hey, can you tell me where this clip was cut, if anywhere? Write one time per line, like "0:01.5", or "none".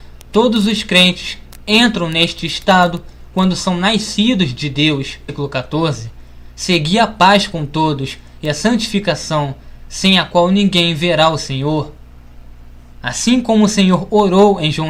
none